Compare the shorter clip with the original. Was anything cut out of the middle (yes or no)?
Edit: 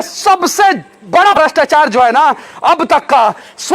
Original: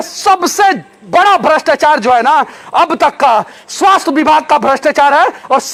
yes